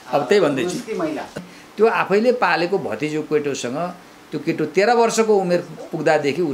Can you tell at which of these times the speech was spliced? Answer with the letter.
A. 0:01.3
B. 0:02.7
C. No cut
A